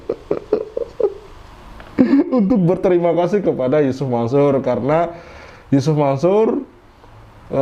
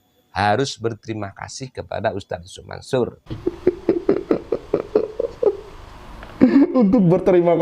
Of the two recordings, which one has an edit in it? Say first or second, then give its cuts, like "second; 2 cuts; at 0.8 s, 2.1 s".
second; 1 cut; at 3.3 s